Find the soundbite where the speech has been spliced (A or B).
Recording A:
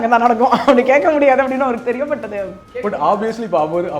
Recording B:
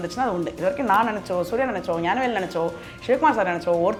A